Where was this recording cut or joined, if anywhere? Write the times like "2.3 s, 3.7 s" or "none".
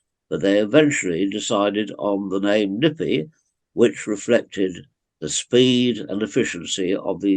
none